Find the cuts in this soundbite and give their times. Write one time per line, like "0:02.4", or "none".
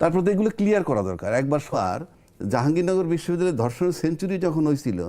0:01.7